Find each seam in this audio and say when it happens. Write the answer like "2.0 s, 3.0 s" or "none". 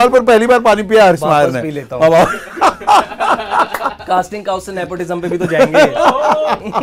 none